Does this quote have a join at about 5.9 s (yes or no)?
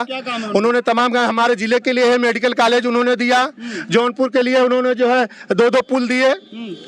no